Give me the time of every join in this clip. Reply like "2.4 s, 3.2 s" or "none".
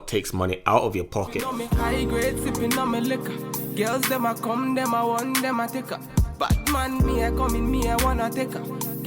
1.4 s